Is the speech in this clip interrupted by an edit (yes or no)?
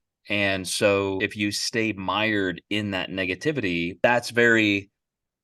yes